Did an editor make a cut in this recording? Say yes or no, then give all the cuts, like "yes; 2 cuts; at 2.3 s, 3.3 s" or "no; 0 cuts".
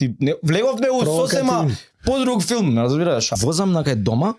yes; 1 cut; at 3.3 s